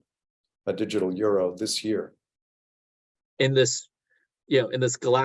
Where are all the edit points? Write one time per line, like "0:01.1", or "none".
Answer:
0:02.9